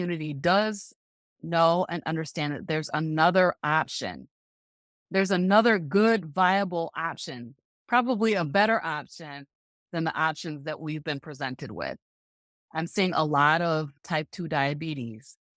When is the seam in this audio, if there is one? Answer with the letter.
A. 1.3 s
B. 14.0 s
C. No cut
B